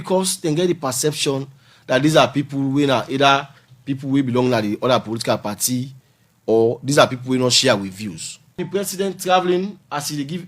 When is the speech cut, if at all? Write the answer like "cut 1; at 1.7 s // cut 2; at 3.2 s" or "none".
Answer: cut 1; at 8.6 s